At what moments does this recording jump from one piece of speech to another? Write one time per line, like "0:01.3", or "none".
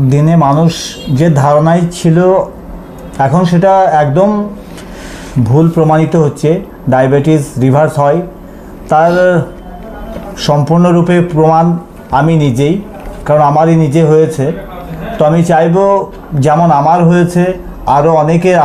none

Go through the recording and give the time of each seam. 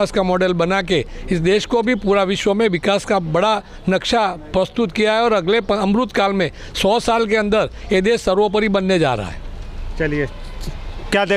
none

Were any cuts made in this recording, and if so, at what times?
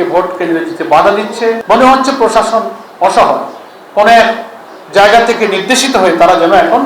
0:01.6

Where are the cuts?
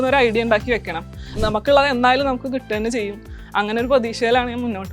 0:01.4

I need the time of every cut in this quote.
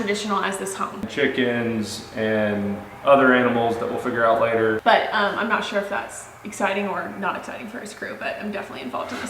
0:01.0
0:04.8

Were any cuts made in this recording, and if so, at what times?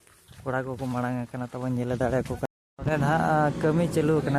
0:02.5

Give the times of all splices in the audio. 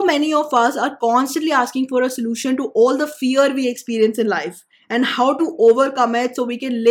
none

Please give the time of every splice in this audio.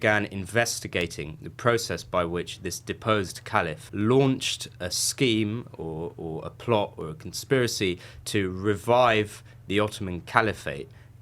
0:03.8

